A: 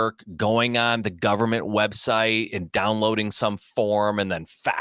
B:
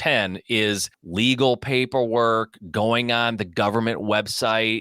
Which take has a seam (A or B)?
B